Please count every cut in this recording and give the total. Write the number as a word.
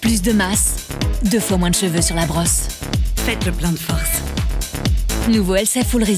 zero